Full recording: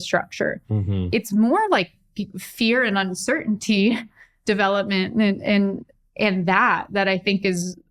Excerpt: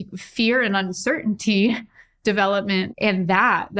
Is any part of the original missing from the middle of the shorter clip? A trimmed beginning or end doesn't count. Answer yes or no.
yes